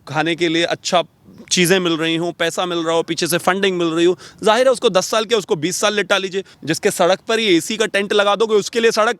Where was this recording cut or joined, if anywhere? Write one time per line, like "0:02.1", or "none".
0:06.5